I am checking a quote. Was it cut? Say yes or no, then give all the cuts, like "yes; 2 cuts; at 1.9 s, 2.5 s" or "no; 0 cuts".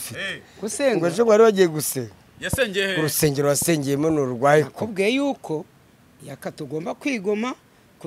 no; 0 cuts